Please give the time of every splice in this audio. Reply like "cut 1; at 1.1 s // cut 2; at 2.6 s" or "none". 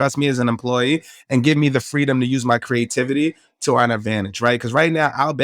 none